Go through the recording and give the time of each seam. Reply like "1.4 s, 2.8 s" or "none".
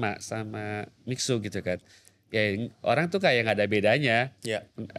none